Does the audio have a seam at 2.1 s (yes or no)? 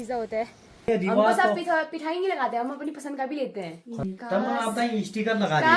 no